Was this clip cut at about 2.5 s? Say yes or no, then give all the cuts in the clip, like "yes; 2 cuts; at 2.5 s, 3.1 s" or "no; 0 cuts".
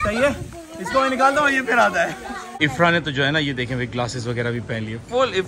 yes; 1 cut; at 2.5 s